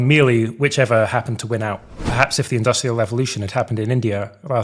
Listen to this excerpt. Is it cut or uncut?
cut